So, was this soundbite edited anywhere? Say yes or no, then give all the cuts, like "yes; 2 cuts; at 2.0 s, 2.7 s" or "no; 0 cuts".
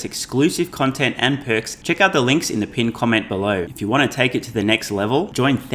yes; 2 cuts; at 1.7 s, 3.7 s